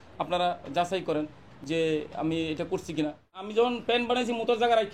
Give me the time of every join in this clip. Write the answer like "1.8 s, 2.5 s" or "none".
3.4 s